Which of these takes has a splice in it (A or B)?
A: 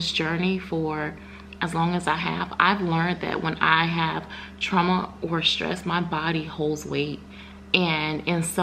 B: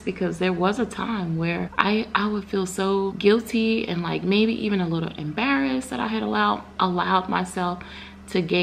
B